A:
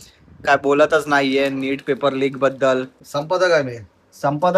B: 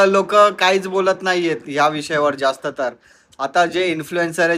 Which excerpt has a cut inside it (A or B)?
A